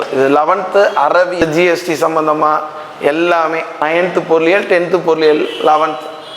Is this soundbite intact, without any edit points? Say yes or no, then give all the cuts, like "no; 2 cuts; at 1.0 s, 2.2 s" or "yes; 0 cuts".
no; 2 cuts; at 1.3 s, 3.8 s